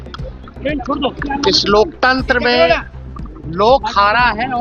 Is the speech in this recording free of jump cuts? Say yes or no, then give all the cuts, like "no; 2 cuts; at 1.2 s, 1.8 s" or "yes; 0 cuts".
yes; 0 cuts